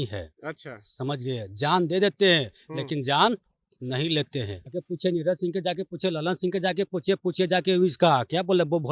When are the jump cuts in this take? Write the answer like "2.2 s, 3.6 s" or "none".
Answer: 4.7 s

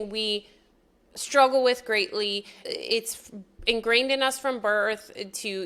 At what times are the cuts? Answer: none

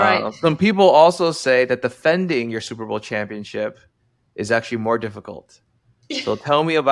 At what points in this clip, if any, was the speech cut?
none

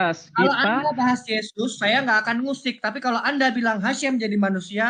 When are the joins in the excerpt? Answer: none

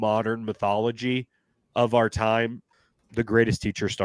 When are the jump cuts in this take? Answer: 2.7 s

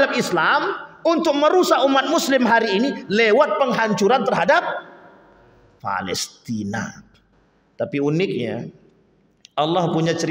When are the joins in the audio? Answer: none

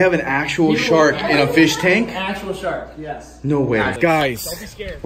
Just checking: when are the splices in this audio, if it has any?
3.9 s

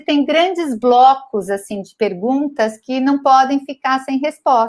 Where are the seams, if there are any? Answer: none

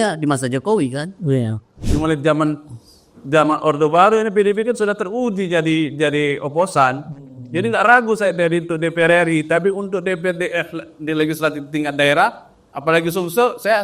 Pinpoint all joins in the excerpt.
1.9 s

